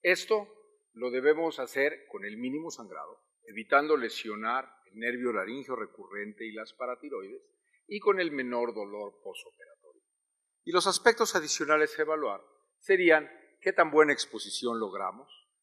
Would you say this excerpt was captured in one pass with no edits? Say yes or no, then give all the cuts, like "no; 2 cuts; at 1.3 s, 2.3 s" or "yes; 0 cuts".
yes; 0 cuts